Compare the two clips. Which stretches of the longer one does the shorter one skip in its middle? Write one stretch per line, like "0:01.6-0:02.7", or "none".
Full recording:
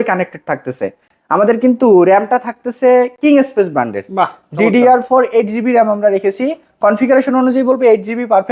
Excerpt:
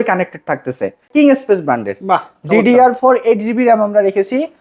0:01.1-0:03.1